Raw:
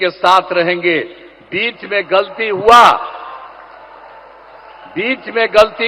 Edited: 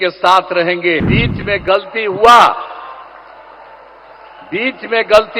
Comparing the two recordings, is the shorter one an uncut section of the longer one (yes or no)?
no